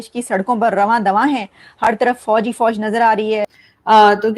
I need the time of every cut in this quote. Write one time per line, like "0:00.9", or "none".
0:03.4